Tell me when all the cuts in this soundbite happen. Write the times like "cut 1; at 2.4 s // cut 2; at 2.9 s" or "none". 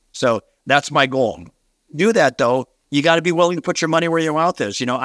cut 1; at 1.7 s // cut 2; at 2.8 s